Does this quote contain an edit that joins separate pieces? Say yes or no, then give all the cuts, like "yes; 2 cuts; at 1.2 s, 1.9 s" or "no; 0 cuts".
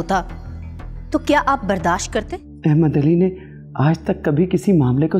yes; 1 cut; at 2.4 s